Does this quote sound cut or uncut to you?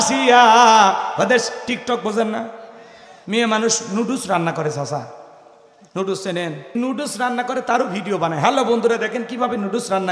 cut